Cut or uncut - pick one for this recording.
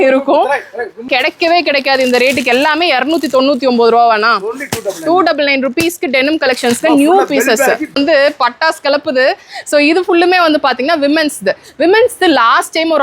cut